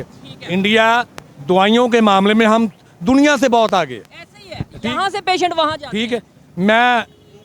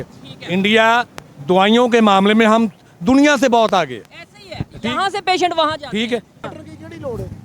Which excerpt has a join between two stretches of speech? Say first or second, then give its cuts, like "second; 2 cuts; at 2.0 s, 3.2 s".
second; 1 cut; at 6.4 s